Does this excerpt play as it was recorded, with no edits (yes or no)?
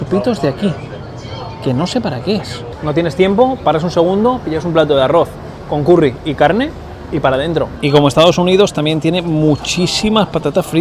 no